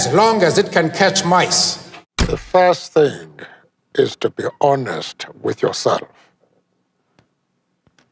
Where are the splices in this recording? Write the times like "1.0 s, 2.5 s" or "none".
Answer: none